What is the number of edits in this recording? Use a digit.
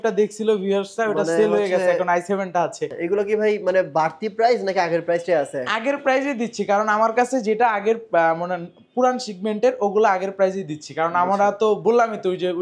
1